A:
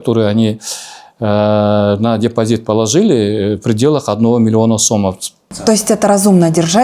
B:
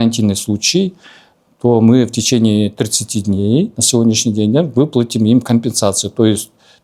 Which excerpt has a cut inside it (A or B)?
A